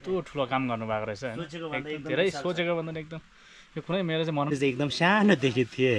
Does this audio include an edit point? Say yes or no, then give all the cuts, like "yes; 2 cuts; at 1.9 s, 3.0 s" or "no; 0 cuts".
yes; 1 cut; at 4.5 s